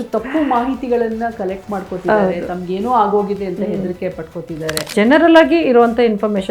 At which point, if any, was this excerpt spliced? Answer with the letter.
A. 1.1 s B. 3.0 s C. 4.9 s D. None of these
C